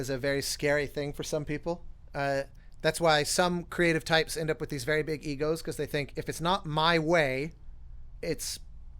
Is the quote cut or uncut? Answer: cut